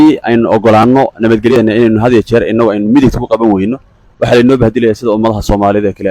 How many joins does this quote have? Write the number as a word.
one